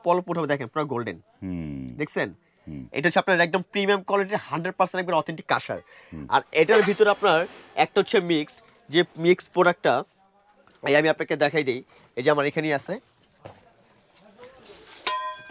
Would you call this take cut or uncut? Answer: uncut